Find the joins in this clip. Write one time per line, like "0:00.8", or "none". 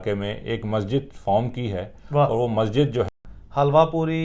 0:03.1